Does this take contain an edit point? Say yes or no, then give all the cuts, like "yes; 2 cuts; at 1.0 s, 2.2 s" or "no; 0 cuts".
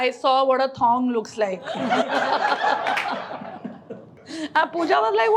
no; 0 cuts